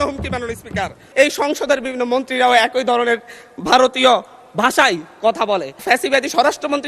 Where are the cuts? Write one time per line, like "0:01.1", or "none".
0:01.0
0:05.8